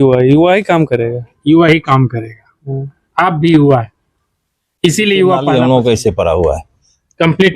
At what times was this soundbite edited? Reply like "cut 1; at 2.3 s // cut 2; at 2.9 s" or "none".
cut 1; at 5.4 s

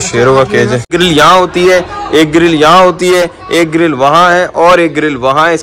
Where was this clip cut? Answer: cut 1; at 0.9 s

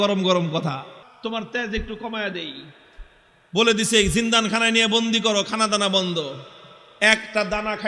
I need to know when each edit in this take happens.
cut 1; at 1.0 s

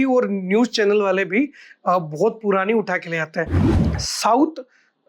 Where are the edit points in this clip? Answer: cut 1; at 3.6 s

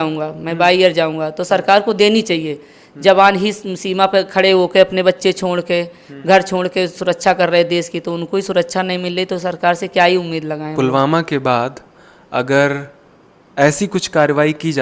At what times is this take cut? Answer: cut 1; at 10.7 s

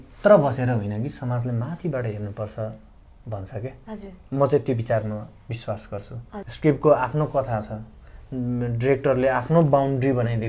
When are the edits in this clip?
cut 1; at 6.4 s

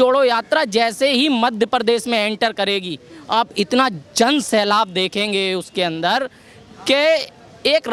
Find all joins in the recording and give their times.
none

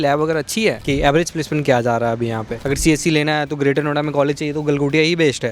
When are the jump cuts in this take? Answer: cut 1; at 0.8 s // cut 2; at 2.5 s

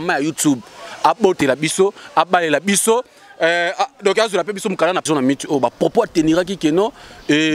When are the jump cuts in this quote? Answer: cut 1; at 5.0 s

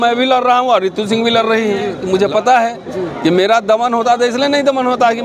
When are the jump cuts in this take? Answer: cut 1; at 1.9 s

